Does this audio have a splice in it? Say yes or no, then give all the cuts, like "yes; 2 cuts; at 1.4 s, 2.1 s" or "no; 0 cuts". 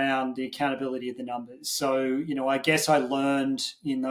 no; 0 cuts